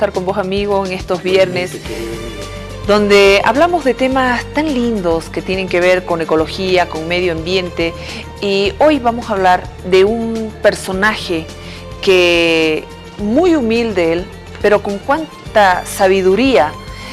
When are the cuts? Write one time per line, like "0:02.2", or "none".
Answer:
0:15.9